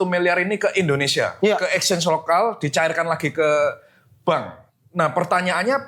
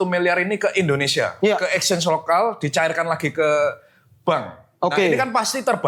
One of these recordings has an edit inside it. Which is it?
first; 1 cut; at 4.6 s

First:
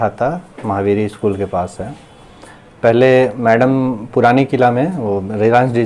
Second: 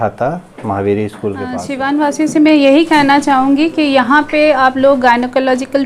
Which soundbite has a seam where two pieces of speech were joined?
second; 1 cut; at 1.7 s

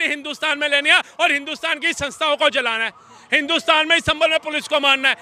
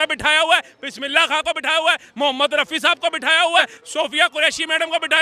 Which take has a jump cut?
second; 1 cut; at 3.7 s

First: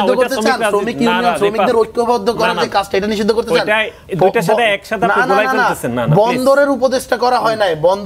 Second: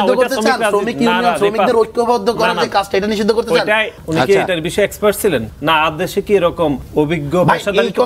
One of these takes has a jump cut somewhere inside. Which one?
second; 3 cuts; at 4.0 s, 5.5 s, 6.8 s

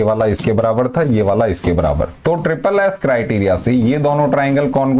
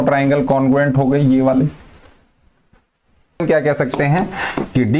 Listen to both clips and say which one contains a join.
second; 1 cut; at 3.4 s

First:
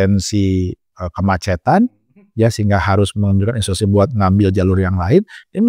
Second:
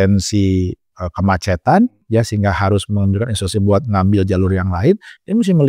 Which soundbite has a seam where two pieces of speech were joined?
second; 1 cut; at 2.0 s

